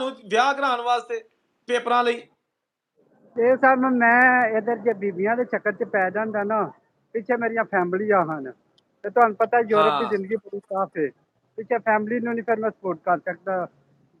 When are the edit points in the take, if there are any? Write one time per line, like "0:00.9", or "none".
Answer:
none

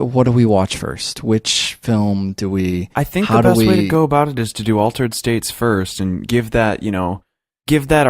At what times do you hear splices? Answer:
0:03.8

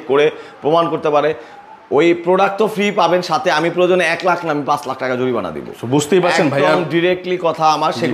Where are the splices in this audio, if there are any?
none

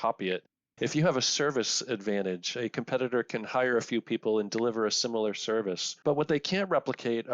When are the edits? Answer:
0:05.9

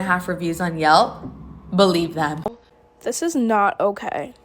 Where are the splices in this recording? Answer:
0:02.4

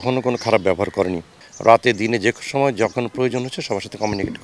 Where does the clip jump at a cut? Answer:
0:01.4

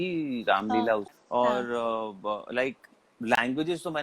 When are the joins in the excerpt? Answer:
0:01.1

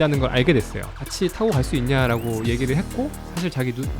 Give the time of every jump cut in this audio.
0:00.9

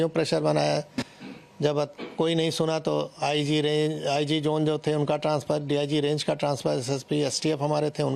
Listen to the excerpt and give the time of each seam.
none

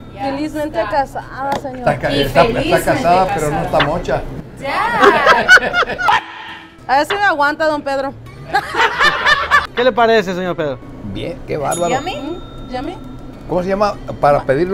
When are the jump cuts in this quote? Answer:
0:09.7

